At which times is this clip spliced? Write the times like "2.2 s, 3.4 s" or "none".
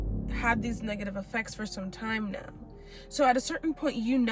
none